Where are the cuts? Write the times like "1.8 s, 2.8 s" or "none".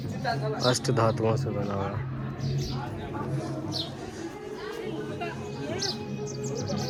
none